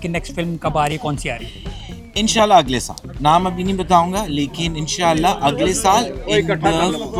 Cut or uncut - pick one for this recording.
uncut